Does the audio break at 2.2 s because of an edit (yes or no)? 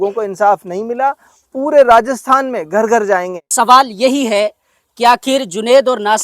no